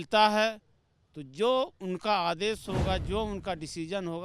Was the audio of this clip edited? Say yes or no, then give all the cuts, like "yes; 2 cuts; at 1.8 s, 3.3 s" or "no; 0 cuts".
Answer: no; 0 cuts